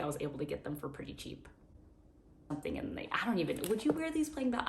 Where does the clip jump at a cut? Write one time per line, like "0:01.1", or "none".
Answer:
0:02.5